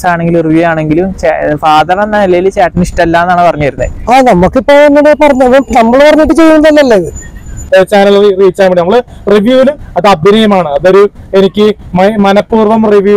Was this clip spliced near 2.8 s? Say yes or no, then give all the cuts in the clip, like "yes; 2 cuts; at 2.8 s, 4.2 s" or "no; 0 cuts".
no; 1 cut; at 7.6 s